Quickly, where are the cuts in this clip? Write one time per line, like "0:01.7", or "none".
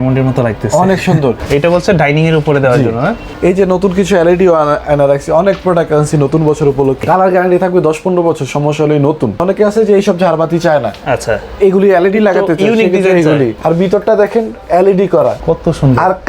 0:01.4
0:03.2
0:07.0
0:09.4
0:13.6
0:15.4